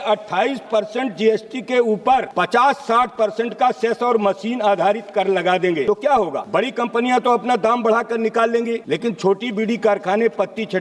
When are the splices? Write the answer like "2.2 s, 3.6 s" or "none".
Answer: 2.3 s, 6.1 s, 8.8 s